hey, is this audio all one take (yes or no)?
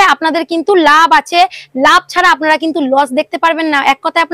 yes